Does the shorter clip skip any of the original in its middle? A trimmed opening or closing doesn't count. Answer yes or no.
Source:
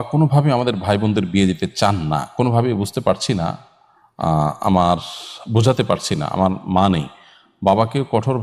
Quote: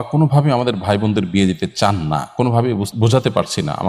yes